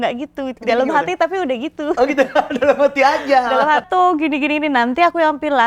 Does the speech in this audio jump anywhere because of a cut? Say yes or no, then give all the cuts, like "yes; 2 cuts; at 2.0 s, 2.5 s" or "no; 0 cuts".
yes; 1 cut; at 3.9 s